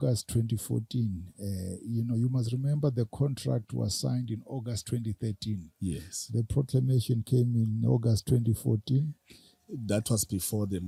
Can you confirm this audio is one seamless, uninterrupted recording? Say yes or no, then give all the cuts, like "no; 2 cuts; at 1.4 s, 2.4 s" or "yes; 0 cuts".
yes; 0 cuts